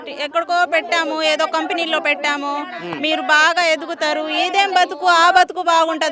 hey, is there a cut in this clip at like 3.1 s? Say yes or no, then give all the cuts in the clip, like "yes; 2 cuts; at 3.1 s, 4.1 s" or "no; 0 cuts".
no; 0 cuts